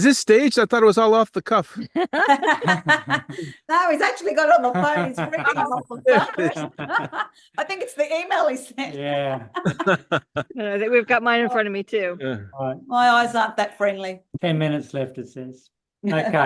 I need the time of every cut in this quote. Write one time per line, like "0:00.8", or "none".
none